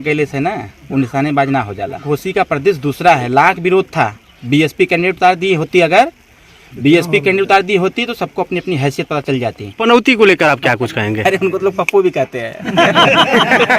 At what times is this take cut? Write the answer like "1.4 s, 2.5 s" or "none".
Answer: 2.0 s, 9.8 s